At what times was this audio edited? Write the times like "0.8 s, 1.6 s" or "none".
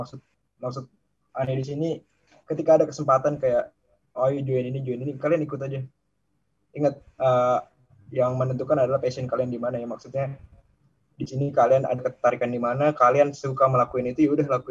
none